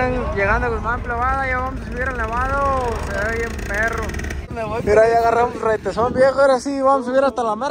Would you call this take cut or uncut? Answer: cut